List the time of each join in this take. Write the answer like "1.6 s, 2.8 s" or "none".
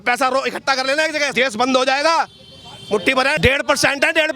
1.3 s, 3.4 s